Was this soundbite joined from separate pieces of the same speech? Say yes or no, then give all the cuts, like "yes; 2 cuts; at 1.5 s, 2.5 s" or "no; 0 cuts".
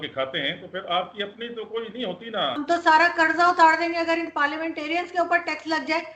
yes; 1 cut; at 2.5 s